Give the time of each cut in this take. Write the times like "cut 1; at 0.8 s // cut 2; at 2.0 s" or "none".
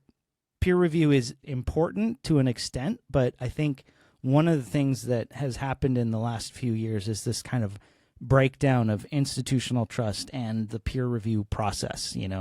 cut 1; at 1.3 s

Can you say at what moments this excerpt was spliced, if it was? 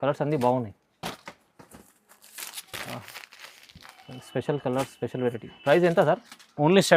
none

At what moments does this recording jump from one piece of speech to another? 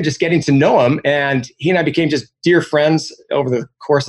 none

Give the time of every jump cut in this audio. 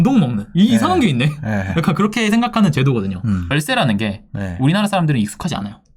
cut 1; at 3.5 s

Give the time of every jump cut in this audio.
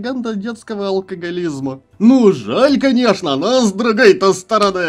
cut 1; at 1.9 s

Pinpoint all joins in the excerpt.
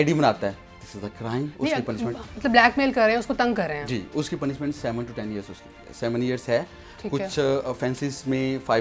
none

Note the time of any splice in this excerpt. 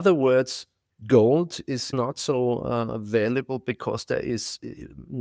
cut 1; at 1.9 s

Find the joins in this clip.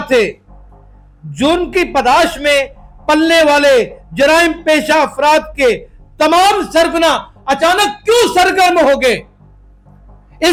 none

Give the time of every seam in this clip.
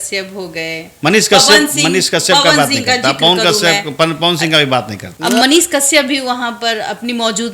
cut 1; at 5.1 s

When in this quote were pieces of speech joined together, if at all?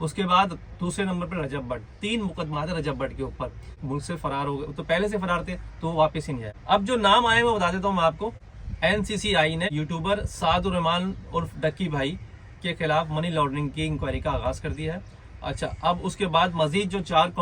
none

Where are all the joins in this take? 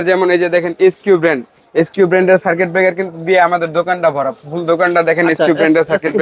none

